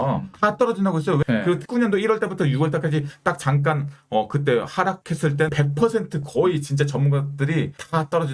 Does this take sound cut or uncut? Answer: cut